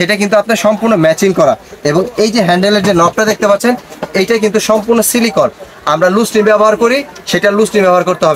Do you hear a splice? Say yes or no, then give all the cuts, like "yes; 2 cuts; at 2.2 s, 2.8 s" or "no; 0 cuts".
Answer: no; 0 cuts